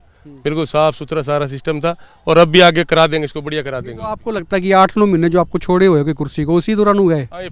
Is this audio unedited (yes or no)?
yes